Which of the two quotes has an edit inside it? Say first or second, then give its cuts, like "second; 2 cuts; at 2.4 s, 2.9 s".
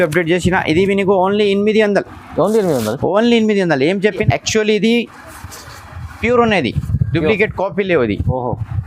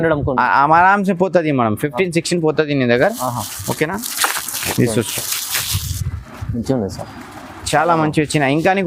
first; 1 cut; at 4.2 s